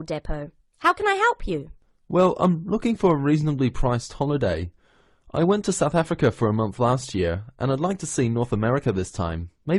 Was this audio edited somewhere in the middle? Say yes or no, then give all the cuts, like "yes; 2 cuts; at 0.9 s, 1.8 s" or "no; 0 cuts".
no; 0 cuts